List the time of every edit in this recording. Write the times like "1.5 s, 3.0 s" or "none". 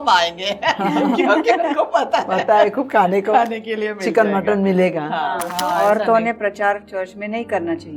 5.5 s

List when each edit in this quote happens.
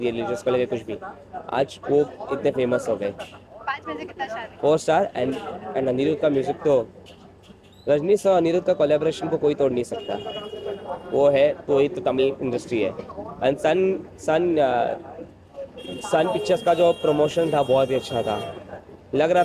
none

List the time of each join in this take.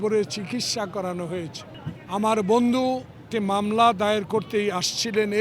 3.3 s

